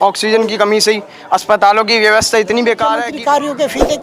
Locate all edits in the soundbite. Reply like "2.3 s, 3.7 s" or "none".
3.1 s